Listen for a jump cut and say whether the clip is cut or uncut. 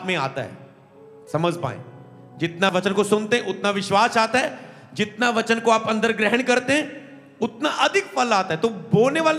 cut